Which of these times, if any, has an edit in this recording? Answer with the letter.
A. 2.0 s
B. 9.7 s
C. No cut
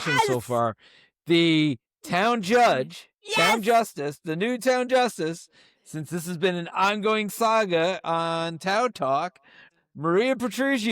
B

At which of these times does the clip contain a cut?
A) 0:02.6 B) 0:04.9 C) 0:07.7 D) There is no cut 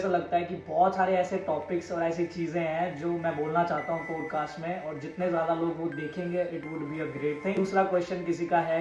C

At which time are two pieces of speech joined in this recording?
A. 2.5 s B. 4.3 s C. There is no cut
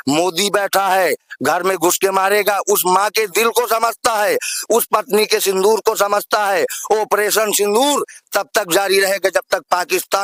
C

